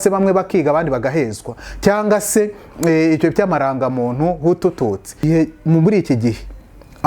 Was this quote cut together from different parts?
yes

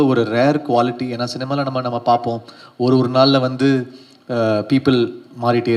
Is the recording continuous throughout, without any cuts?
yes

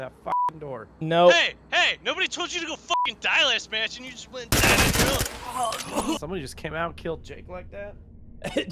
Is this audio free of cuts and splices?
no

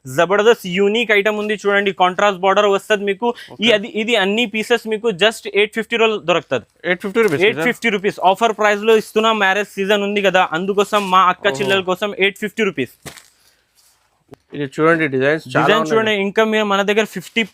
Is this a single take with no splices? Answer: yes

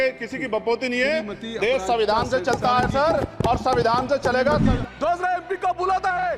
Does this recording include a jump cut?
yes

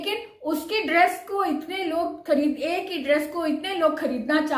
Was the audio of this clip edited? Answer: no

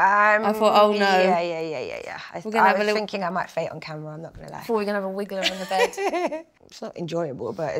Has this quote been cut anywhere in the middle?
no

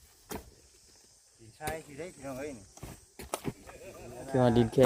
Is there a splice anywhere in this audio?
no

